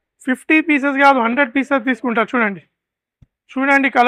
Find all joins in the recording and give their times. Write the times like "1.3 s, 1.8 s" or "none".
none